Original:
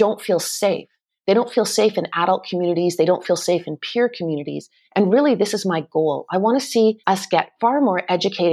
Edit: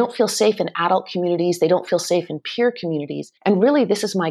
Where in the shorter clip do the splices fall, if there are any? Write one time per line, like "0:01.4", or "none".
0:03.2